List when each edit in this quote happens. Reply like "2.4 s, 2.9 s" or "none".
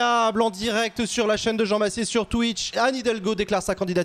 2.7 s